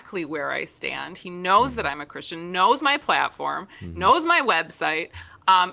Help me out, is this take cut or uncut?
uncut